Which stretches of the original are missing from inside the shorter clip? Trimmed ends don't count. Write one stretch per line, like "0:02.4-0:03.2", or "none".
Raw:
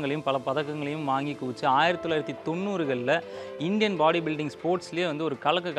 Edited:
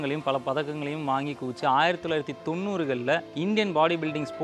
0:03.3-0:03.5